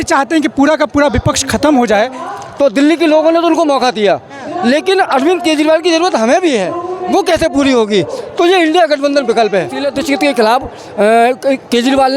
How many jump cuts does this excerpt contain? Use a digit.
2